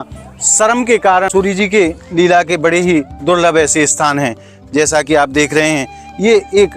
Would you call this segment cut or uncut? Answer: cut